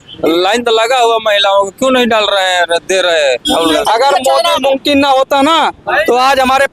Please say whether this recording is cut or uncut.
cut